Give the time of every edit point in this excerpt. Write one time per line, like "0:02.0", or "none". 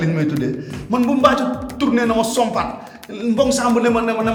none